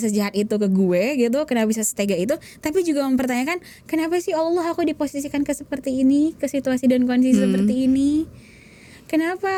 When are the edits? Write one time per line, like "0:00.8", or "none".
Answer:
none